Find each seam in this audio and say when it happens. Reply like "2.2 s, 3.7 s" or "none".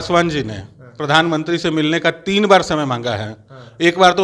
none